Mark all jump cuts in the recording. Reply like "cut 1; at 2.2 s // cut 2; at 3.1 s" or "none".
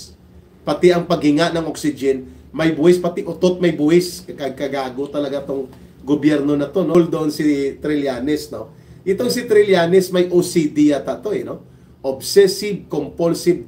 cut 1; at 6.9 s